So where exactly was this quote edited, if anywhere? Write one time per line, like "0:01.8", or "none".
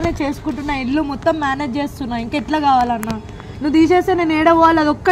none